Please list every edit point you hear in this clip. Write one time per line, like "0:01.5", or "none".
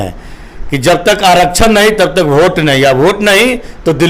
none